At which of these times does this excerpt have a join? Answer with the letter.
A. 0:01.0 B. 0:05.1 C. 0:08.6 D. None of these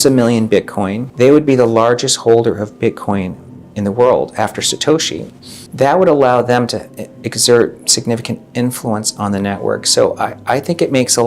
A